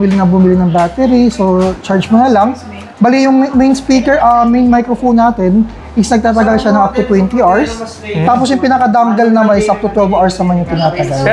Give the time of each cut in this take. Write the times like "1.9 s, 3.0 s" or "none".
none